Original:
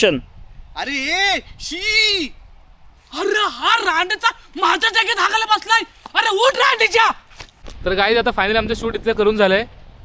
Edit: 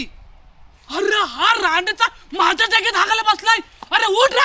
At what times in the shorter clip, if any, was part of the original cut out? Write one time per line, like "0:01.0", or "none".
none